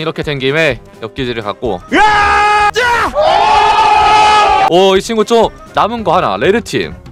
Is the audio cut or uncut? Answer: cut